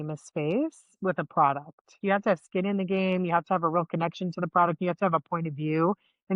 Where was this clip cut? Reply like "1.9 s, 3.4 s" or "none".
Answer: 2.0 s